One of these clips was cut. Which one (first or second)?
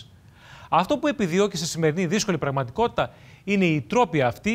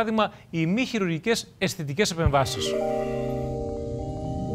second